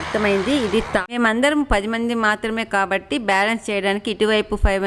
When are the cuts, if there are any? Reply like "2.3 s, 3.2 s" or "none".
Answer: 1.1 s